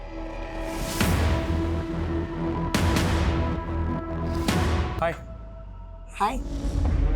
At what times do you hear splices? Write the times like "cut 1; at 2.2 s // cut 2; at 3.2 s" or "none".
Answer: cut 1; at 4.9 s